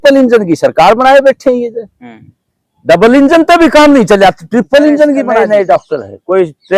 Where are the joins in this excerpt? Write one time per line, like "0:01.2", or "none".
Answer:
0:05.3